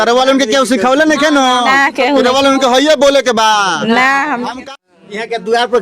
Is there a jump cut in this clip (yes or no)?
yes